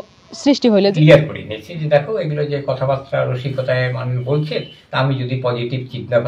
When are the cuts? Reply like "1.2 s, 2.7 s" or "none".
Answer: 0.9 s, 4.8 s